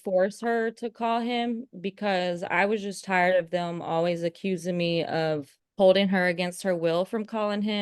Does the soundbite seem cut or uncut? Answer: cut